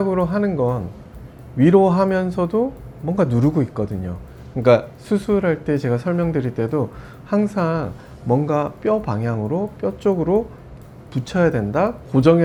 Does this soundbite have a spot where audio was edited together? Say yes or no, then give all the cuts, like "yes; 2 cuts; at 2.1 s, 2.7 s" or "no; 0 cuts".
no; 0 cuts